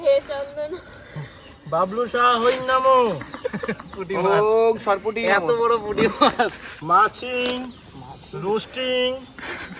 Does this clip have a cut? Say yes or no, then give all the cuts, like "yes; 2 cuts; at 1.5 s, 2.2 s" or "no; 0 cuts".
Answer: no; 0 cuts